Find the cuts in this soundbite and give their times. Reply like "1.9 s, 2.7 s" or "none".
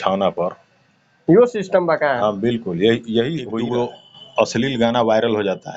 3.6 s